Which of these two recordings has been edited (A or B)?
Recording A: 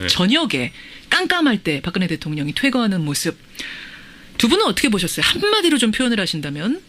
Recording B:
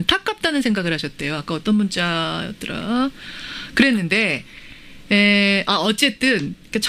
B